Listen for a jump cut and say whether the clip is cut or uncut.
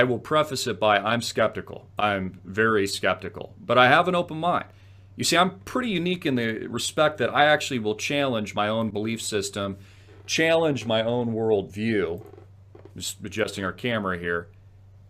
cut